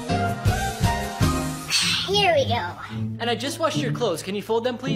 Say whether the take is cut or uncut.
cut